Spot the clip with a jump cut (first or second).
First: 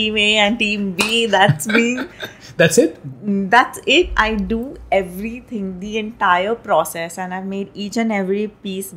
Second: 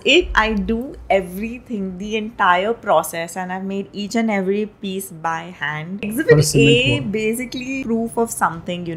second